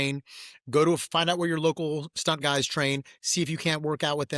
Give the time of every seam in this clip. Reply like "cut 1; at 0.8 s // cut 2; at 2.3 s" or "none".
none